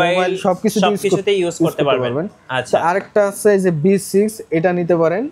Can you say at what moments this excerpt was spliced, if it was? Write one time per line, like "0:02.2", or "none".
none